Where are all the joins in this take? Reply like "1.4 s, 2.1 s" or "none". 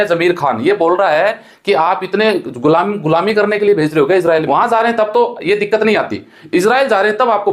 4.4 s